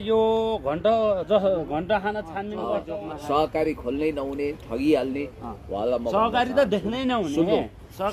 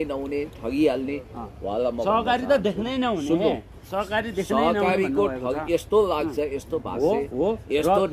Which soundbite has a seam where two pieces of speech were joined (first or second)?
first